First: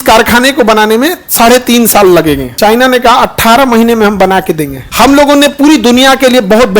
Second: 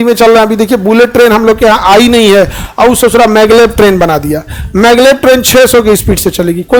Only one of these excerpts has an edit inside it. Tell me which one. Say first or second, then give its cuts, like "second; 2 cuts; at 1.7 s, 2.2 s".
first; 2 cuts; at 2.5 s, 4.8 s